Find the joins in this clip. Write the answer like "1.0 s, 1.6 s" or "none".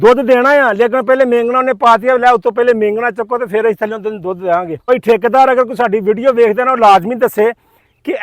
4.9 s